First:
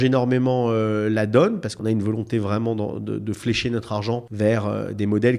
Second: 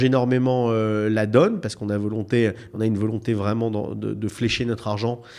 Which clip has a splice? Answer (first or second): first